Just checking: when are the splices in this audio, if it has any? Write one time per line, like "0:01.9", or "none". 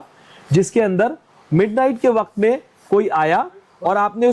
none